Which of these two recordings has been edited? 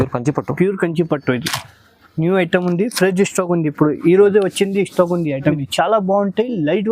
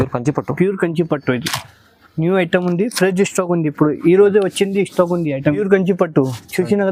first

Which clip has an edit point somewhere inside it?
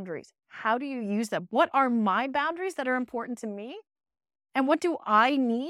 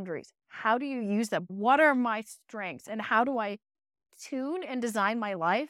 second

